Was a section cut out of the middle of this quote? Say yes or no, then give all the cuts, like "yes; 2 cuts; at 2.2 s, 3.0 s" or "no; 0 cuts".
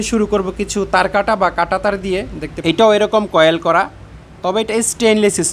yes; 1 cut; at 2.4 s